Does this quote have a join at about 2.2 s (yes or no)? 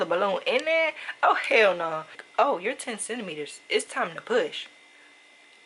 yes